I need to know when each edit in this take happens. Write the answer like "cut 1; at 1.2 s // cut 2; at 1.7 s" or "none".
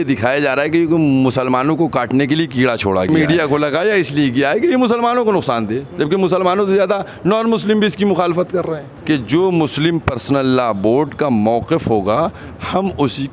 cut 1; at 3.1 s // cut 2; at 8.9 s